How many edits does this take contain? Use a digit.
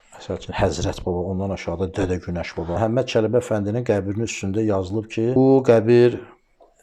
2